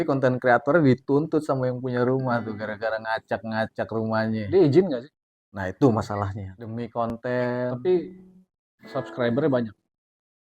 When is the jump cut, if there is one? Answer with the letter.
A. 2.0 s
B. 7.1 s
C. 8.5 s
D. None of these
B